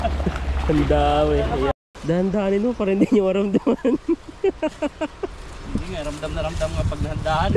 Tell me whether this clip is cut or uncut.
cut